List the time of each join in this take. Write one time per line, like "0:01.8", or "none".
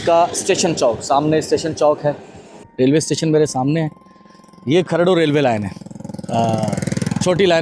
0:02.6